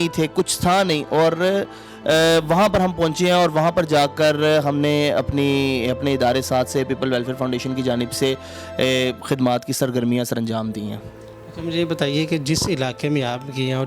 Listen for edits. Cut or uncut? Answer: uncut